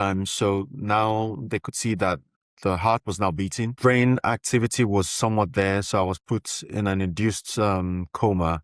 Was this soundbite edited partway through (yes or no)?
yes